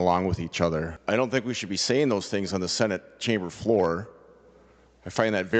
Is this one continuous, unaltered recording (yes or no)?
no